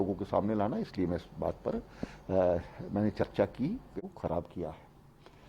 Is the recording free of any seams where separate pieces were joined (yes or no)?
no